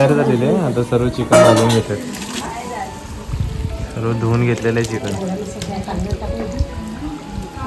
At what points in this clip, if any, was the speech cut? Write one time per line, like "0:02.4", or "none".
none